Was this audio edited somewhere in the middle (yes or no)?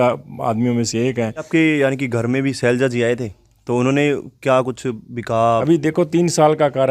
yes